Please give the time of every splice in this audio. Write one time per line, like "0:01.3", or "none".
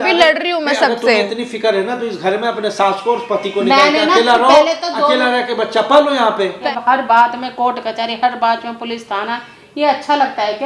0:06.6